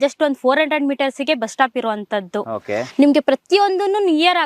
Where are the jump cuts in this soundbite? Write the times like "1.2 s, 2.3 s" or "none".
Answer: none